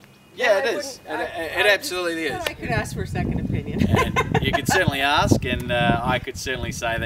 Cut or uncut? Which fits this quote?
cut